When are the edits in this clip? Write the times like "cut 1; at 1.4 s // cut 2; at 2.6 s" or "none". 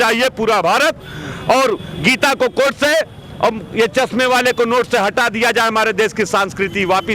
none